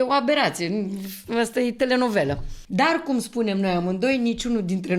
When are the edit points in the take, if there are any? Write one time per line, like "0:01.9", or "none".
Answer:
0:02.5